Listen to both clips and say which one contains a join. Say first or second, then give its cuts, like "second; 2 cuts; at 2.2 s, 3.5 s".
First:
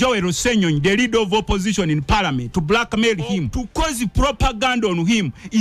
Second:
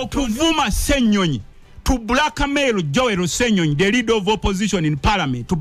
first; 1 cut; at 3.6 s